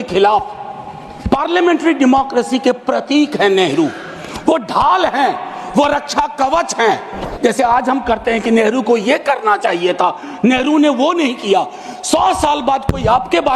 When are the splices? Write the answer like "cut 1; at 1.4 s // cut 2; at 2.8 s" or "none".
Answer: cut 1; at 7.3 s

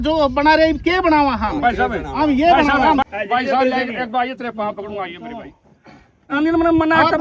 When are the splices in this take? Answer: cut 1; at 3.0 s // cut 2; at 6.3 s

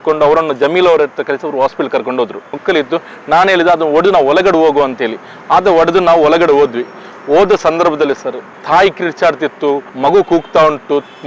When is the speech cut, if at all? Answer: none

